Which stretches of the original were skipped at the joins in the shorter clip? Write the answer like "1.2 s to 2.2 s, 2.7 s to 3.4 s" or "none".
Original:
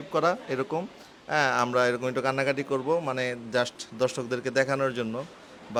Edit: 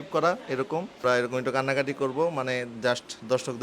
1.0 s to 1.7 s